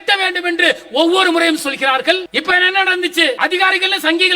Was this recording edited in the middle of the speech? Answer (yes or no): yes